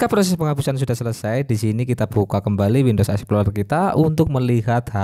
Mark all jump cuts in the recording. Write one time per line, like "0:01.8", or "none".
none